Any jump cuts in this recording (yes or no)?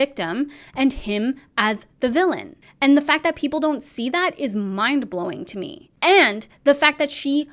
no